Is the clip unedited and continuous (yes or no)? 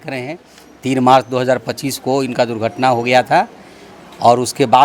yes